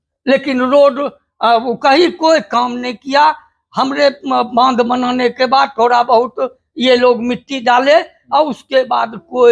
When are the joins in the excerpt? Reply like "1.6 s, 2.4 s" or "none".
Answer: none